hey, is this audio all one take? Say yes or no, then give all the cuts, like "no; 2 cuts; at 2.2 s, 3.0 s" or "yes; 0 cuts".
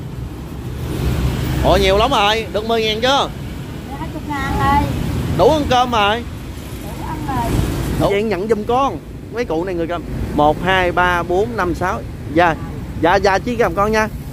no; 1 cut; at 8.1 s